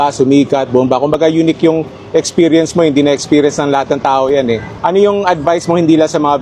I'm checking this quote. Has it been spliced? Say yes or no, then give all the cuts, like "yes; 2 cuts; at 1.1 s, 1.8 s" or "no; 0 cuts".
no; 0 cuts